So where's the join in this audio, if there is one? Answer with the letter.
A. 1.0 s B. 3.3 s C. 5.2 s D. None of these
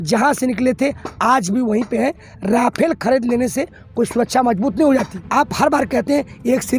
C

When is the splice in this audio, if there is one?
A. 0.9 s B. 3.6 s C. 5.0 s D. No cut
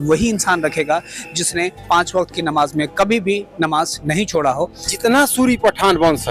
C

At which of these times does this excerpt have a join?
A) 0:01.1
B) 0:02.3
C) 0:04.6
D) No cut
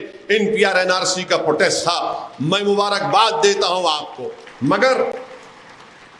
D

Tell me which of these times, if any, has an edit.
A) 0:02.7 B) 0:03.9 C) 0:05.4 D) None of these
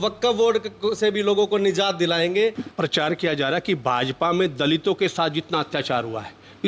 A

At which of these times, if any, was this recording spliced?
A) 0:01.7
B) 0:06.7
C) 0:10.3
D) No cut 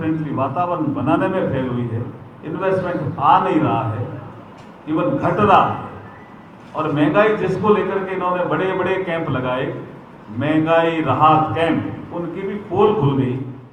D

